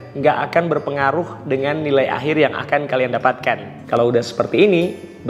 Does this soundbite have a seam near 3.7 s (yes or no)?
yes